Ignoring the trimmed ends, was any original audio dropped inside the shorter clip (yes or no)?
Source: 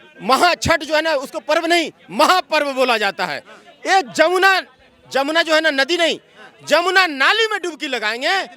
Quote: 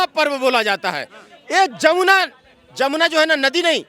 no